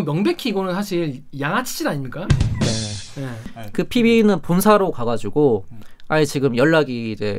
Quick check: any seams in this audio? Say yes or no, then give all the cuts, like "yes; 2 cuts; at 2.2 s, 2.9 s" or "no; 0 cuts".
yes; 1 cut; at 3.5 s